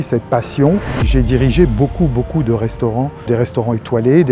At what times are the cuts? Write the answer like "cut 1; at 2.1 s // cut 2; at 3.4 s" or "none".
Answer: cut 1; at 1.0 s // cut 2; at 3.2 s